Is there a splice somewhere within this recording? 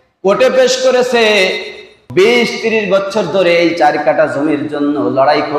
yes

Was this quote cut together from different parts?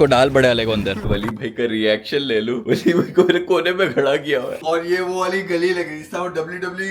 yes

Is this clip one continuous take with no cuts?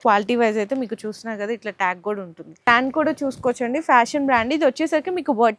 no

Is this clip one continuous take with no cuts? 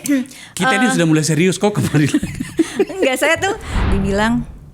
no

